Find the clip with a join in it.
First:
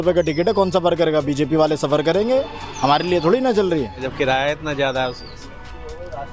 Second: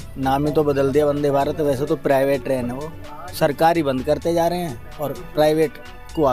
first; 1 cut; at 4.0 s

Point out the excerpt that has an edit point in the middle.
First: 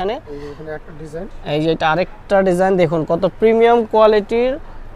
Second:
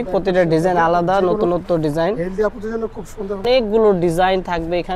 second; 1 cut; at 3.4 s

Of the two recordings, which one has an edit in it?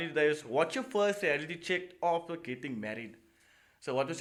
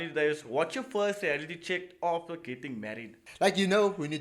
second; 1 cut; at 3.2 s

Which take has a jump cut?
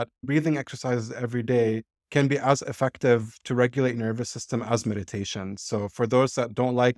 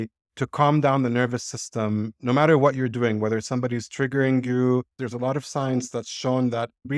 second; 1 cut; at 5.0 s

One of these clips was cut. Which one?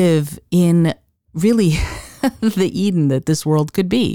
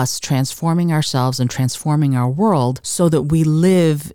second; 1 cut; at 2.8 s

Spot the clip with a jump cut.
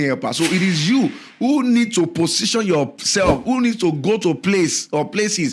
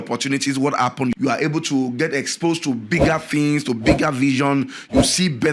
second; 1 cut; at 1.1 s

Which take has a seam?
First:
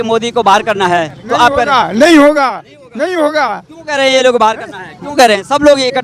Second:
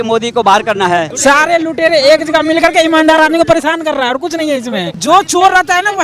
second; 2 cuts; at 1.1 s, 4.9 s

